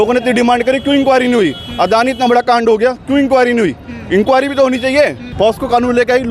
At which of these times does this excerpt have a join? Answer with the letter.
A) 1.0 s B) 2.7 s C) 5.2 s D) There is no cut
C